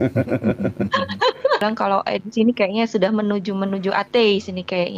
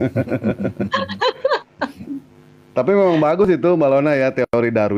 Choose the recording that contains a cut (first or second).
first